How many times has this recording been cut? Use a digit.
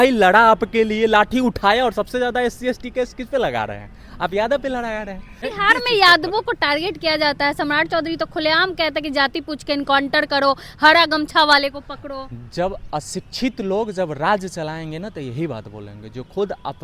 1